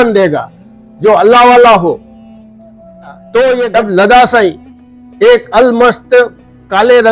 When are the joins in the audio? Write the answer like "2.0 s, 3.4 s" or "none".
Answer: 3.7 s